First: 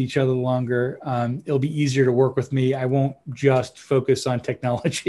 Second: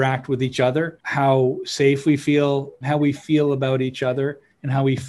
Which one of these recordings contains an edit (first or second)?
second